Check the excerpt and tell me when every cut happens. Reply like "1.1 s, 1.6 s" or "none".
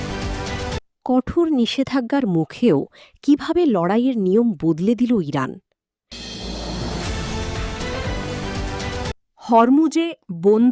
6.3 s, 9.2 s